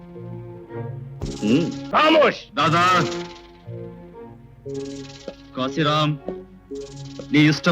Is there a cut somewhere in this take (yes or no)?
yes